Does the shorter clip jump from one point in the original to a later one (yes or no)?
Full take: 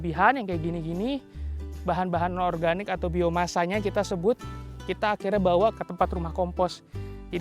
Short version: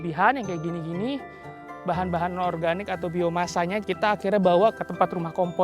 yes